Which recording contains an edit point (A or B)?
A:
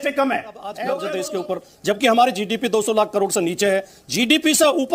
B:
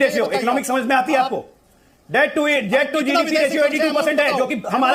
A